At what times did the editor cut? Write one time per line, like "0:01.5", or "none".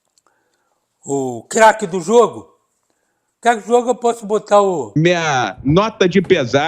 0:04.9